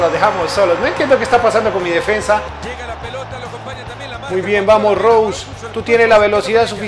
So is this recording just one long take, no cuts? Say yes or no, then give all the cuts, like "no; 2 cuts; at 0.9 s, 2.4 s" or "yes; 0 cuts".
no; 1 cut; at 2.6 s